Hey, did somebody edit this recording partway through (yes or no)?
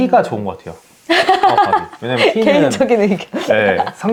no